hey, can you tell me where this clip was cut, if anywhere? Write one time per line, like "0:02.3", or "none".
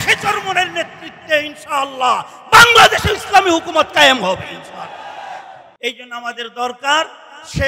0:05.6